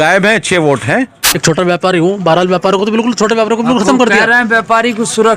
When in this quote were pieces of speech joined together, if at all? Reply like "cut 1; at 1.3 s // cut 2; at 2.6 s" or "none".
cut 1; at 1.2 s